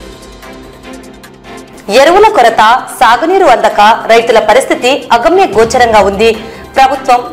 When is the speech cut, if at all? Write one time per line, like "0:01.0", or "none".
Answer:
0:01.7

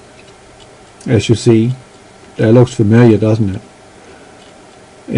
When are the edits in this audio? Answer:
0:04.3

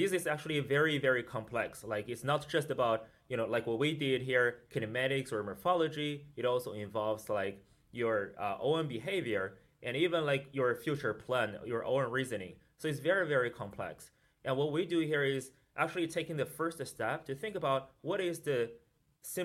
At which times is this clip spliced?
none

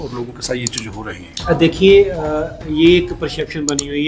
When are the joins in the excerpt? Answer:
none

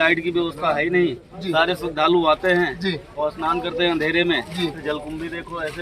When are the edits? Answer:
none

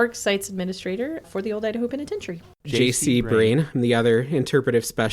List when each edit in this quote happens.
0:01.2
0:02.7

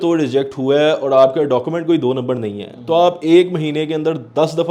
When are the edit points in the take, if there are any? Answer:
none

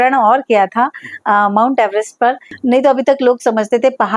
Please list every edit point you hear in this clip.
0:02.5

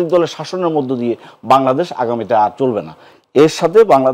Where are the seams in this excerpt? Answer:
none

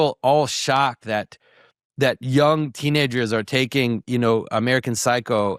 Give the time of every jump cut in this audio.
none

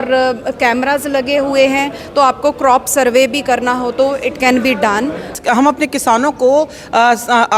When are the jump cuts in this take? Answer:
0:05.3

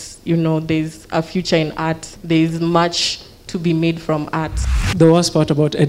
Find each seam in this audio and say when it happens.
0:02.1
0:04.6

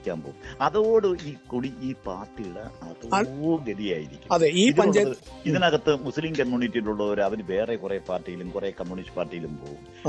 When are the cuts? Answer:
none

